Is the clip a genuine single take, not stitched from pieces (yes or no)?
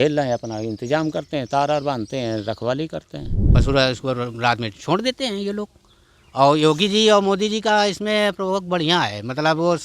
no